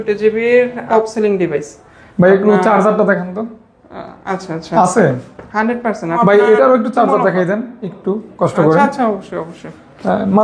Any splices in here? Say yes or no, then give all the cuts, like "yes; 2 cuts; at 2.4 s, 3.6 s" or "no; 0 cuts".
yes; 2 cuts; at 0.8 s, 6.2 s